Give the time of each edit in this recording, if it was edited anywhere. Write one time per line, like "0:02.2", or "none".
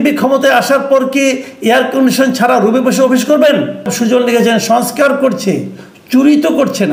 0:03.9